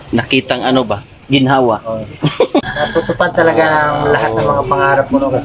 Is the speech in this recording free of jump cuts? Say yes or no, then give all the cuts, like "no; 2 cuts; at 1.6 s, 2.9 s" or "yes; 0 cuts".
no; 1 cut; at 2.6 s